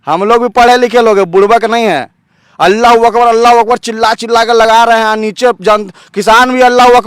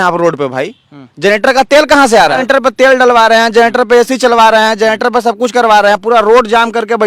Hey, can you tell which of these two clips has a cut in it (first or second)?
second